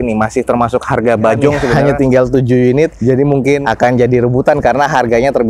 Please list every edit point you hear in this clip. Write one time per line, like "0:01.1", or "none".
0:01.8